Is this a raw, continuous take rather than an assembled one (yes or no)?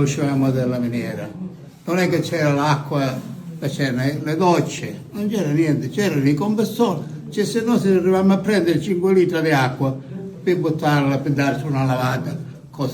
yes